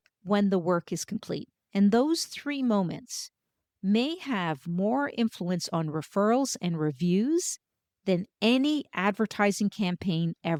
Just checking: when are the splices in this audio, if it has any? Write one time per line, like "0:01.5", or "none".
none